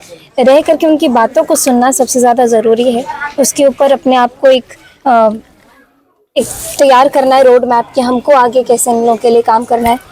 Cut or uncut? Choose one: uncut